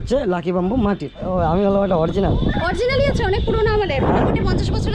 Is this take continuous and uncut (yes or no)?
no